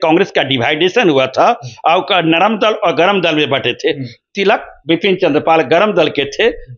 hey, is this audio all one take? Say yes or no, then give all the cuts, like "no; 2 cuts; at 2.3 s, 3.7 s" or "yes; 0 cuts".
yes; 0 cuts